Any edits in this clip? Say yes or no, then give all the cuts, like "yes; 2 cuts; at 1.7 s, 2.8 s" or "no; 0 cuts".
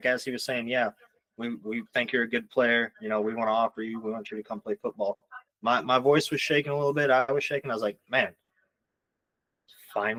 no; 0 cuts